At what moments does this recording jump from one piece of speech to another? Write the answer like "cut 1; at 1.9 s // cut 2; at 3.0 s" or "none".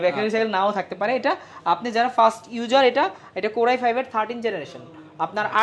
none